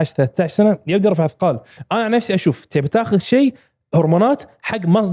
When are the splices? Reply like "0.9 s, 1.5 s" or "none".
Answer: 1.7 s